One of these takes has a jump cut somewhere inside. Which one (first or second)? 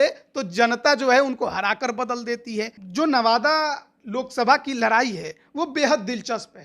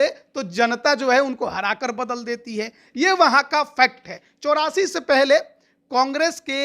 first